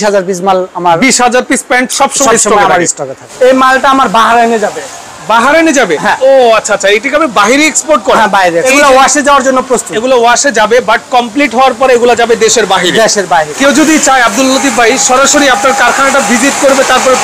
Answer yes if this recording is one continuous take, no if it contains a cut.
no